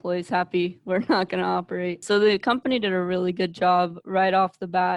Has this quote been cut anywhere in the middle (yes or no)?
yes